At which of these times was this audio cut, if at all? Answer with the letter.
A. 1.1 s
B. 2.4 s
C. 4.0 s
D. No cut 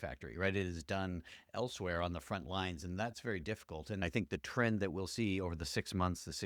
C